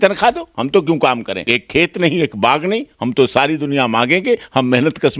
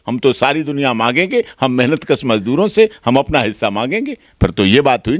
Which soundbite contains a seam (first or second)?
first